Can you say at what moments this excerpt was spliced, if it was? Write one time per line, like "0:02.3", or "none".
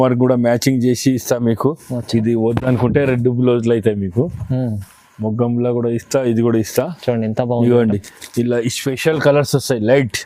none